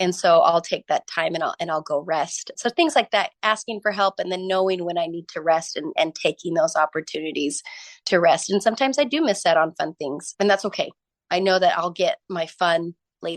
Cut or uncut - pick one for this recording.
cut